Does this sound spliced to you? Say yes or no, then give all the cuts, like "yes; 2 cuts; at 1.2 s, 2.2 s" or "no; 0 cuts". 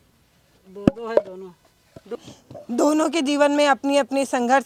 yes; 1 cut; at 2.2 s